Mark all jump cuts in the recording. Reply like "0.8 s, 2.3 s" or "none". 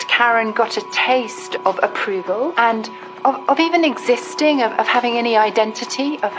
1.4 s, 2.5 s